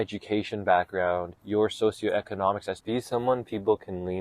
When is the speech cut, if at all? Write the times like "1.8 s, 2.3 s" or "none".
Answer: 1.3 s, 2.7 s